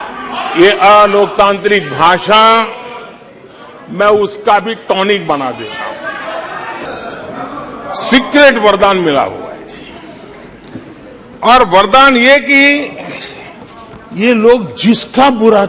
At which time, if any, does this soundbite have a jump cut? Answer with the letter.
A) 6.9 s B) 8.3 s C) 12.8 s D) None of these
A